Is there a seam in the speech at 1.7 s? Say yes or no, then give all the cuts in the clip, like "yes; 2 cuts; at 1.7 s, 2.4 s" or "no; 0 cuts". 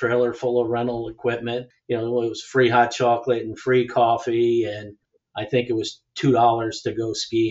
yes; 1 cut; at 1.7 s